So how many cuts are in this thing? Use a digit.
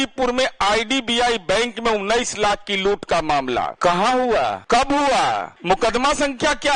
3